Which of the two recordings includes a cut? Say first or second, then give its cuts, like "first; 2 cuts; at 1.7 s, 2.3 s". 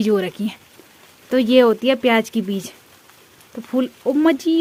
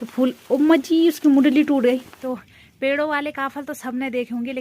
second; 1 cut; at 2.1 s